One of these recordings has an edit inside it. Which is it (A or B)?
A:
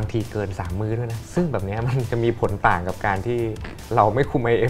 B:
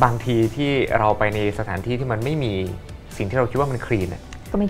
A